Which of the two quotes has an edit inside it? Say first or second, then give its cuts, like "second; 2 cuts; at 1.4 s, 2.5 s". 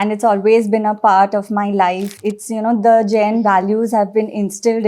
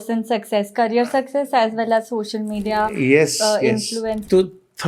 first; 1 cut; at 2.1 s